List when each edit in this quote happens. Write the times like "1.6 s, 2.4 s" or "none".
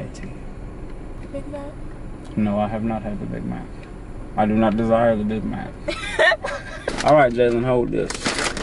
6.9 s